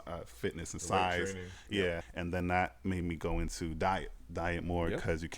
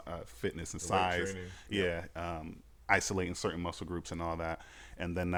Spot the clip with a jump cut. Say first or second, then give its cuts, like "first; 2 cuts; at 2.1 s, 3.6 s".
first; 1 cut; at 2.1 s